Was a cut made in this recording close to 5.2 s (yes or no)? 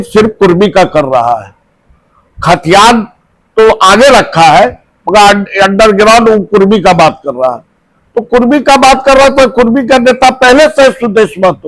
no